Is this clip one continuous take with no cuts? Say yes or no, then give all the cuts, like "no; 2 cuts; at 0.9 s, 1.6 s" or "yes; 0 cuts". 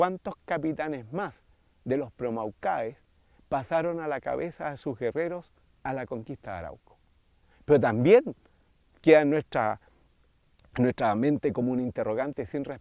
no; 1 cut; at 4.2 s